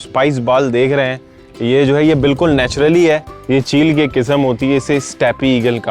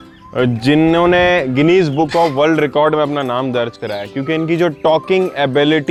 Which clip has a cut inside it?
first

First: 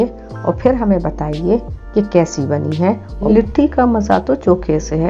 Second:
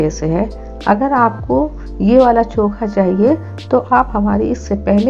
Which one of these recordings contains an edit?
first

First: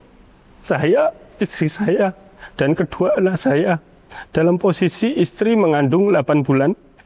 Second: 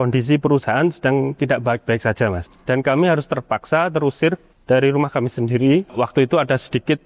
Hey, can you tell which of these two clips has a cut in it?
second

